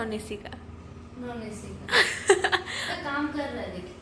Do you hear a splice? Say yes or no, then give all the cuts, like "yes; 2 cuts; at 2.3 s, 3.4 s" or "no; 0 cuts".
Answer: no; 0 cuts